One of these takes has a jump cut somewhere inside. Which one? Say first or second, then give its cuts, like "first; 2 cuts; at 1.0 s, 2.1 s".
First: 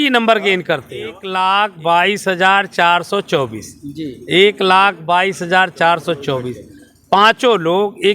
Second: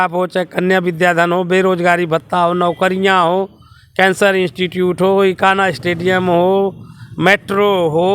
first; 1 cut; at 1.2 s